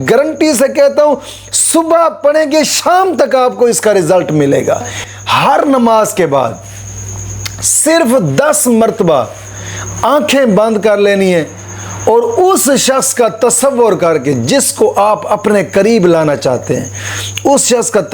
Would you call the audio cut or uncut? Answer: cut